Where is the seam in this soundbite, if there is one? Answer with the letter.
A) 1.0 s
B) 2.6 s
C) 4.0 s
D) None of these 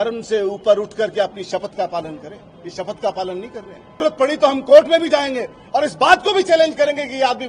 C